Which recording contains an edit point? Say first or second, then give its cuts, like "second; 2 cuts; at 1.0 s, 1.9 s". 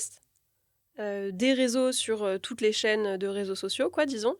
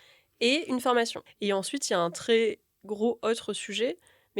second; 1 cut; at 1.2 s